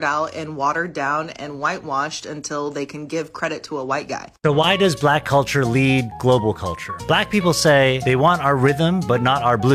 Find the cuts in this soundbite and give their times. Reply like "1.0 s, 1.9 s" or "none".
4.3 s

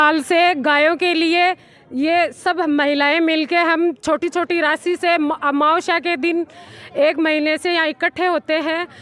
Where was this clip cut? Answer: none

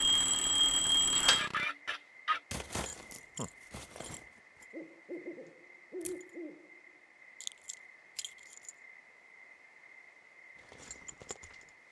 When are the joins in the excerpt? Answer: 1.0 s

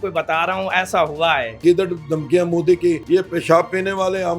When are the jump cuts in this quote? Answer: 1.6 s, 3.0 s

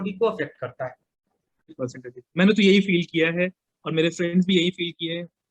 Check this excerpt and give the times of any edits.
1.8 s

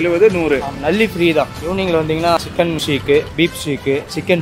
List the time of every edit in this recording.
1.5 s, 2.6 s

